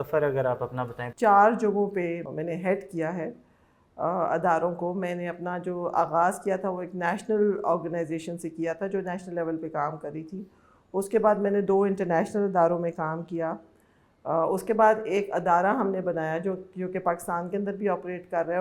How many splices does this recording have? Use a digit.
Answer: 2